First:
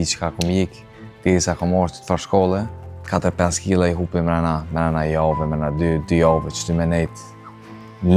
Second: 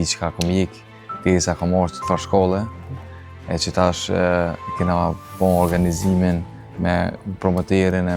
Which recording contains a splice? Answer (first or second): first